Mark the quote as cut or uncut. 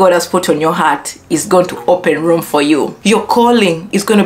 cut